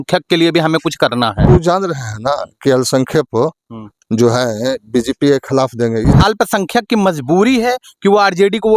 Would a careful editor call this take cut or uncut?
cut